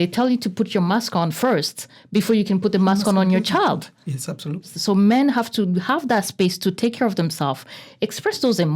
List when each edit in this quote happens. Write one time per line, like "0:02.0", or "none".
0:04.7